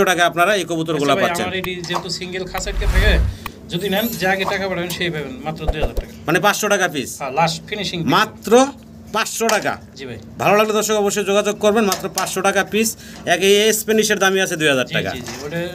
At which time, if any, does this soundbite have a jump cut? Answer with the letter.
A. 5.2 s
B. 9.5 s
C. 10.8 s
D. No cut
D